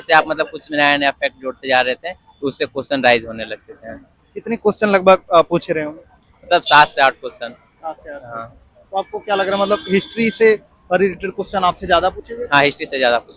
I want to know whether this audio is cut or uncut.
uncut